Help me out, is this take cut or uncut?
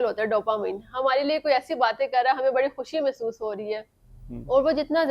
uncut